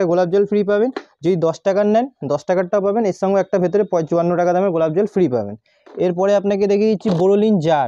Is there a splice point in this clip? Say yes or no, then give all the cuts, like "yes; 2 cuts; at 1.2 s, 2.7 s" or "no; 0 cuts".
no; 0 cuts